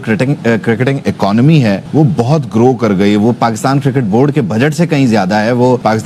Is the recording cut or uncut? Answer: uncut